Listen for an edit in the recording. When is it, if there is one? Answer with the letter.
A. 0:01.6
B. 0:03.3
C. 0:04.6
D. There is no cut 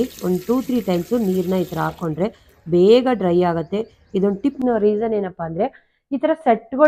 C